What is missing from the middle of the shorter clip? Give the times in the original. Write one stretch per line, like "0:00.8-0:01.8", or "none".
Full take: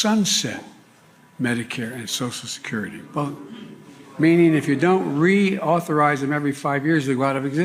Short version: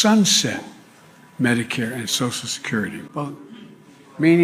none